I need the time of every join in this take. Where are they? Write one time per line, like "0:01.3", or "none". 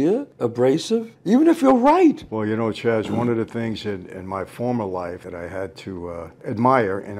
0:02.3
0:05.2
0:06.4